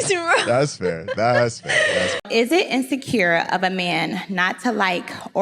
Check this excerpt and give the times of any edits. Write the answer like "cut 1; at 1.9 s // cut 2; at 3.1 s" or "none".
cut 1; at 2.2 s